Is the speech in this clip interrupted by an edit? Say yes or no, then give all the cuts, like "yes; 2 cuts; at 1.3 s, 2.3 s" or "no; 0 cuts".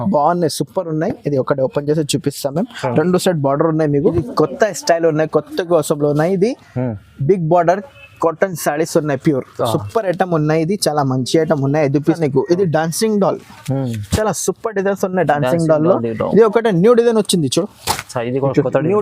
yes; 2 cuts; at 4.1 s, 12.2 s